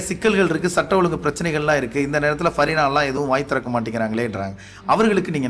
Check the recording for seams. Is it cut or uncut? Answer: uncut